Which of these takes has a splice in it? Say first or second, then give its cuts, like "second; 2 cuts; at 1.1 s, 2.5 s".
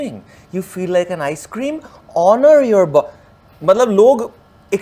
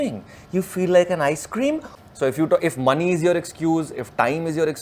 second; 1 cut; at 1.9 s